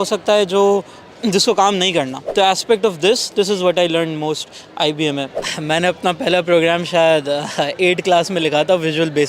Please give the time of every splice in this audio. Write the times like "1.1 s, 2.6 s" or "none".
2.2 s, 5.4 s